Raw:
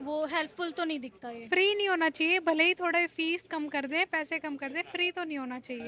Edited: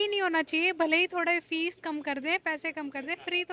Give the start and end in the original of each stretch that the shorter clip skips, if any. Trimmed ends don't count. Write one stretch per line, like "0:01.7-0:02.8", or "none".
none